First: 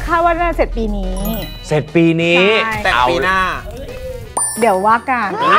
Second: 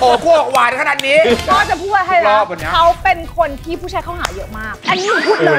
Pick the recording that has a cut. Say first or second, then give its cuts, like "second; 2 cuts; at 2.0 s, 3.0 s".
second; 2 cuts; at 1.4 s, 4.7 s